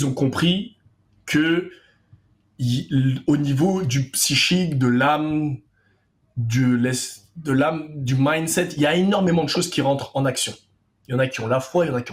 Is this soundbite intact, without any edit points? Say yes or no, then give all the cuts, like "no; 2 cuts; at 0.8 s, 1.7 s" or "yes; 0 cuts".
yes; 0 cuts